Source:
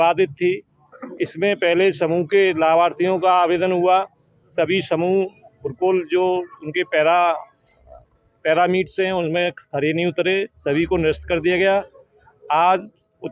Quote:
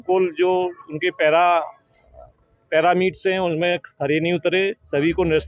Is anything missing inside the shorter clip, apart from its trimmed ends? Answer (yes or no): no